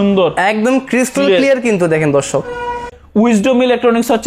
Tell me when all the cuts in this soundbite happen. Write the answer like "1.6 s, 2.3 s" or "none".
3.0 s